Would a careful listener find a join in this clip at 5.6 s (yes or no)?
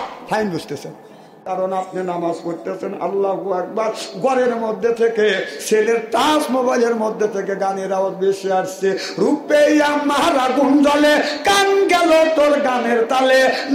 yes